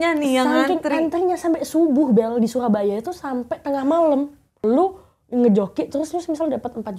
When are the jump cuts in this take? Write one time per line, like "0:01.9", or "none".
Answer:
0:04.6